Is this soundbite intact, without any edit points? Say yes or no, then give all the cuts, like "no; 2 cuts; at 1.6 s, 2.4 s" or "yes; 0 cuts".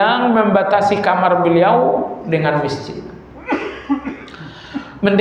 yes; 0 cuts